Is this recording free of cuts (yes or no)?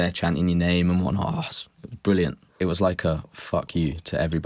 no